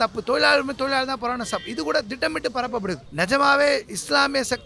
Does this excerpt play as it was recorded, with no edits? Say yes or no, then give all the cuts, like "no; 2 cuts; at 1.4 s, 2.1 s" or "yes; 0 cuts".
no; 1 cut; at 3.1 s